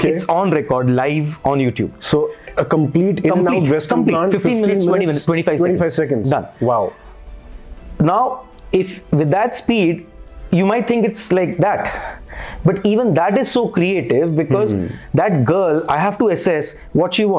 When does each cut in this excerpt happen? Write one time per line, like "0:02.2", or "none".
none